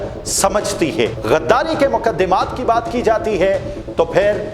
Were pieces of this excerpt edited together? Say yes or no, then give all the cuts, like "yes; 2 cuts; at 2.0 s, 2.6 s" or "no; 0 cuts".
yes; 1 cut; at 1.2 s